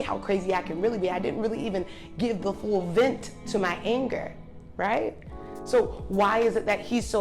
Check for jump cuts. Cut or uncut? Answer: uncut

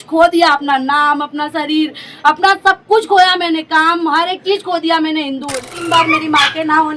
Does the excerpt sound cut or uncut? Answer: cut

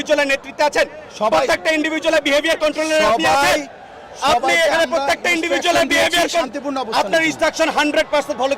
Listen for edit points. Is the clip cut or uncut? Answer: uncut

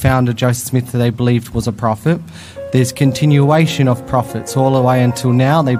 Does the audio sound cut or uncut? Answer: uncut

